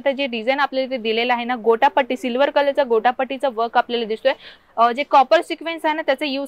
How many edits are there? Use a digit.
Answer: 1